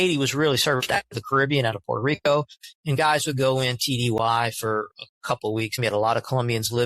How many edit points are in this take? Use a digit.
1